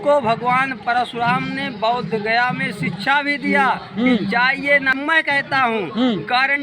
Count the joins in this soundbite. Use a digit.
1